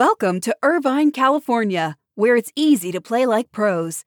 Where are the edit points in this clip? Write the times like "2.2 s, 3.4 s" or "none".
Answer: none